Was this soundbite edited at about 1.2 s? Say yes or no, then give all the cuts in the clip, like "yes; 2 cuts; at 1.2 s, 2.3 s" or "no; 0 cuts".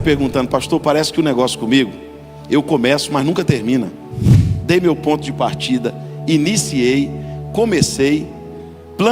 no; 1 cut; at 4.2 s